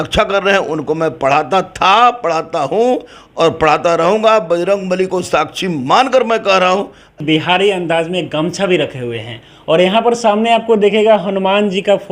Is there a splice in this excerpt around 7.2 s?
yes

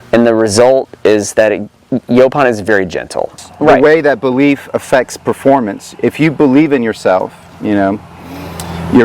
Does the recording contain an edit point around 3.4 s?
yes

